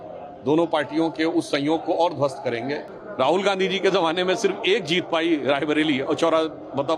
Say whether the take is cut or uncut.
cut